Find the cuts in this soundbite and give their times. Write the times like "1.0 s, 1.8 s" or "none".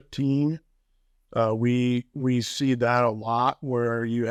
none